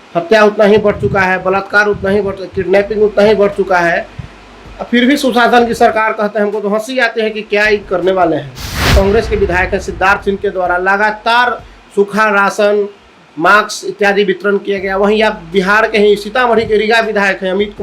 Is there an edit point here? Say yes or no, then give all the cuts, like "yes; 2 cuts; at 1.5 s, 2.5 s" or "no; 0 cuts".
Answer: yes; 1 cut; at 8.8 s